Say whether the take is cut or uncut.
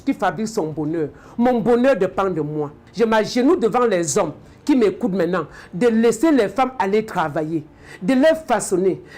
cut